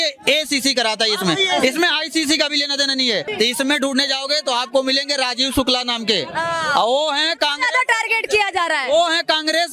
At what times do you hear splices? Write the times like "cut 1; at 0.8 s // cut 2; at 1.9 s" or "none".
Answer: cut 1; at 3.3 s